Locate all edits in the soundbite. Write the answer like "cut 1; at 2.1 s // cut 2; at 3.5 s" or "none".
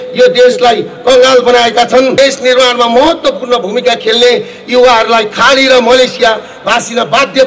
cut 1; at 2.1 s

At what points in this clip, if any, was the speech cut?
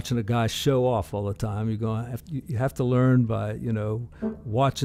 none

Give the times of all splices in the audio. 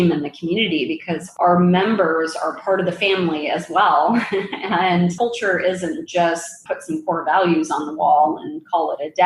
none

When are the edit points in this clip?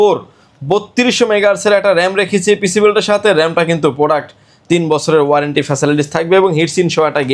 none

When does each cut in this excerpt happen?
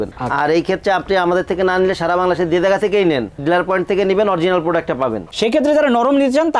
cut 1; at 5.3 s

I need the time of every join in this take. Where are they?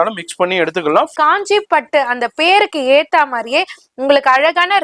cut 1; at 1.1 s

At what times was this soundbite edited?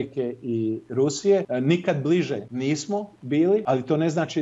cut 1; at 1.5 s // cut 2; at 2.5 s // cut 3; at 3.6 s

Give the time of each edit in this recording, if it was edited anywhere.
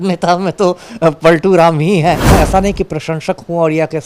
cut 1; at 2.3 s

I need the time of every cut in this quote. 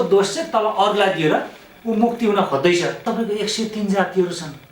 cut 1; at 3.0 s

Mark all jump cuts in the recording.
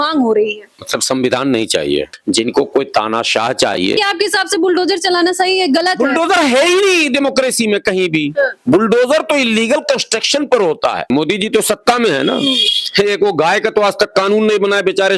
cut 1; at 2.1 s // cut 2; at 4.0 s // cut 3; at 11.1 s

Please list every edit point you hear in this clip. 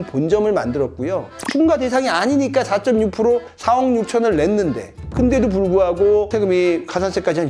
cut 1; at 1.3 s

